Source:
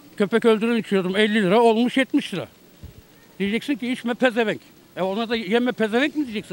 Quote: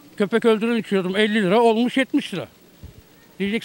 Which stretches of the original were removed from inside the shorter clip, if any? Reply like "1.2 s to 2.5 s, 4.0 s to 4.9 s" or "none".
none